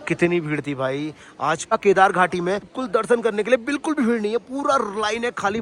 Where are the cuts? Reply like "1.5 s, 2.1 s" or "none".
1.7 s, 2.8 s